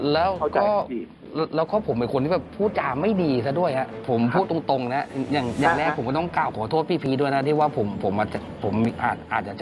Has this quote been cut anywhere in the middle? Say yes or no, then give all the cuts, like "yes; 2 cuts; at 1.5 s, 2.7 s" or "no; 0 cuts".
no; 0 cuts